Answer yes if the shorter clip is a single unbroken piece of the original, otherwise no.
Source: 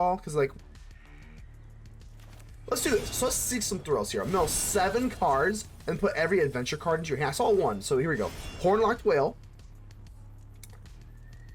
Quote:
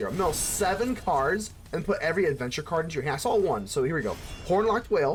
yes